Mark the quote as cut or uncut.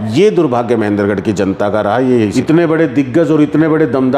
cut